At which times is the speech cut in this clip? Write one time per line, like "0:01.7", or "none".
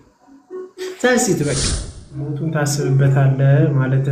0:02.0